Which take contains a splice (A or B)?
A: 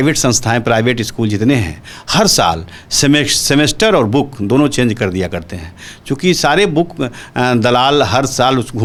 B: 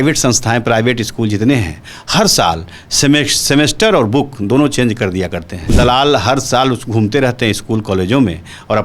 B